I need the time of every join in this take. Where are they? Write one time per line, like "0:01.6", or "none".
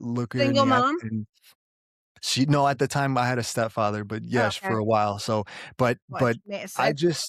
none